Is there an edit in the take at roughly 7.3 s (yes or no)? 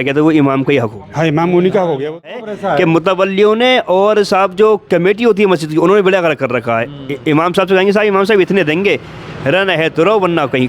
no